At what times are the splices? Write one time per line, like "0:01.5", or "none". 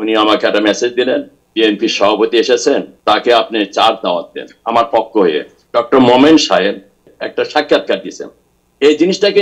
0:01.4
0:02.9
0:05.5
0:07.2